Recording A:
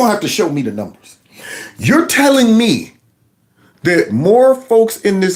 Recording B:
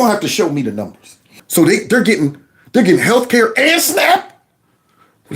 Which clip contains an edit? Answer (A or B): B